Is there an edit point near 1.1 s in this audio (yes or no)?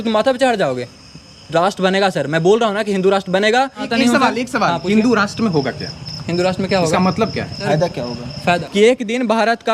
no